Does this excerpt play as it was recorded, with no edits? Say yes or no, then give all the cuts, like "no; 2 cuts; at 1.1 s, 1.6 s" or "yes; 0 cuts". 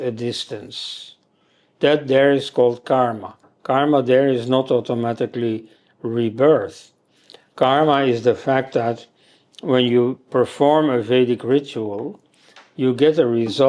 yes; 0 cuts